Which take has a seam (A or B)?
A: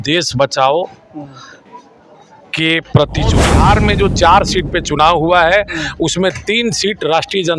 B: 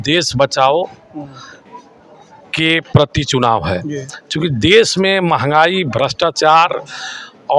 A